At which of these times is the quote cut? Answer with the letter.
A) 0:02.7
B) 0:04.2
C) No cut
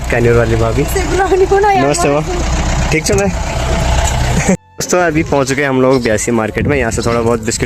C